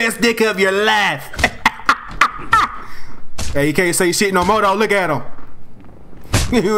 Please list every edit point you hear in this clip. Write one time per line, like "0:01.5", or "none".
none